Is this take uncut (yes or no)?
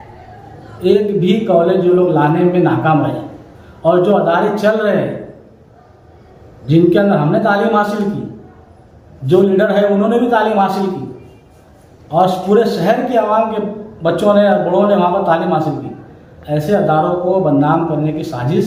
yes